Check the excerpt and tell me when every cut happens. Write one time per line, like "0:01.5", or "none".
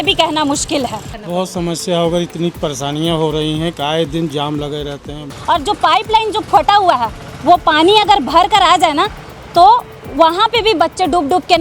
0:01.2
0:05.3

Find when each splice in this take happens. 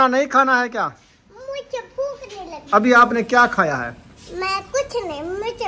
none

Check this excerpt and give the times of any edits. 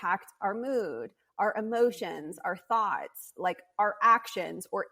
none

